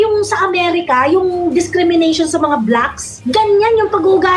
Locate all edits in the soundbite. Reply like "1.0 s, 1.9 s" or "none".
3.2 s